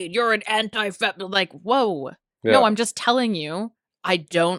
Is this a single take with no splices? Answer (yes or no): yes